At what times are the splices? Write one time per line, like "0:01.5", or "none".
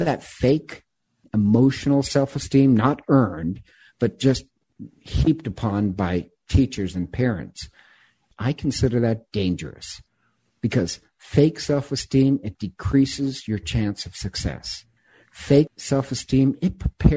0:08.3
0:15.8